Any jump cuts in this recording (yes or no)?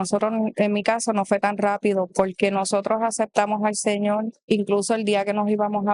yes